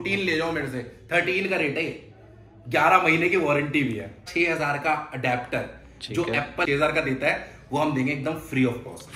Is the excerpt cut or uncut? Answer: cut